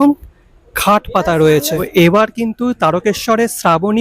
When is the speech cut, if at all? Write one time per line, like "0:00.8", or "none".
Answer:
0:01.9